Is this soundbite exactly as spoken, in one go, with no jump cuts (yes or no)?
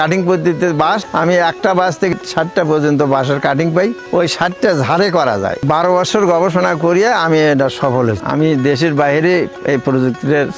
no